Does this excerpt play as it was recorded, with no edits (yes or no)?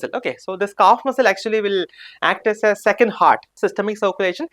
no